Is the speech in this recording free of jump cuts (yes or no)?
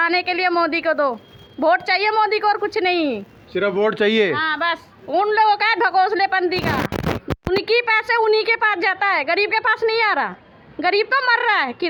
yes